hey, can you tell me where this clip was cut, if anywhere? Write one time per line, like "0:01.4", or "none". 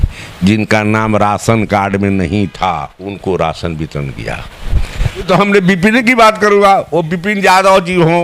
0:03.1
0:05.3